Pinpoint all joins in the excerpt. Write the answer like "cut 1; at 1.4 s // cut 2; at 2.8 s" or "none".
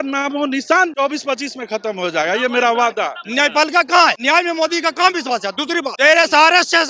cut 1; at 0.9 s // cut 2; at 3.2 s // cut 3; at 4.2 s // cut 4; at 5.9 s

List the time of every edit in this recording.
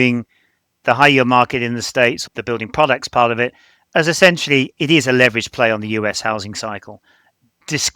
cut 1; at 2.3 s

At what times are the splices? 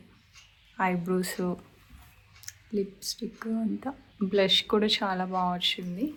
none

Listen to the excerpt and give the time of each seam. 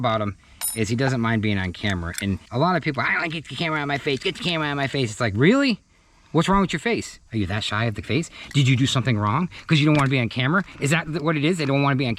cut 1; at 2.5 s

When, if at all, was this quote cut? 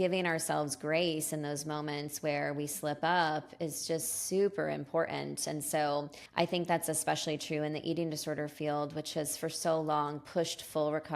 cut 1; at 6.2 s

